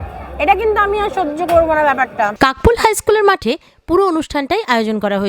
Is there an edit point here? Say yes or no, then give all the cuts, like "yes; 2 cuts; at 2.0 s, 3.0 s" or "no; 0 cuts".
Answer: yes; 1 cut; at 2.3 s